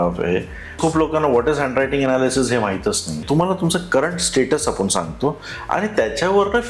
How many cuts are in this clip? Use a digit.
2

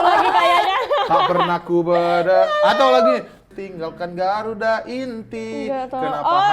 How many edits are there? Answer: 1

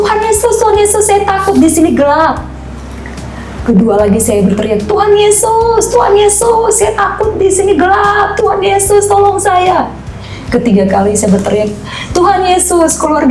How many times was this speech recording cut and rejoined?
0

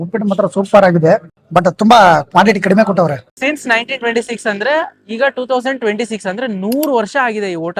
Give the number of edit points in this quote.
2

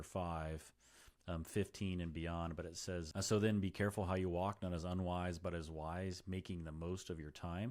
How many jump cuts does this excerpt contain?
1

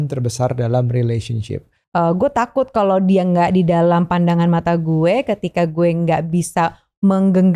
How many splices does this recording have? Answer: 1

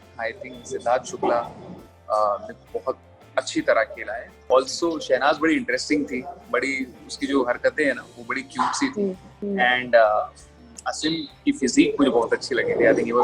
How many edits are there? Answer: 2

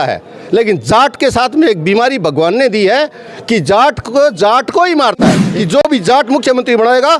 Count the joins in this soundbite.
1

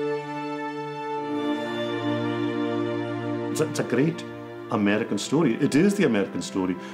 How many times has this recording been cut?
1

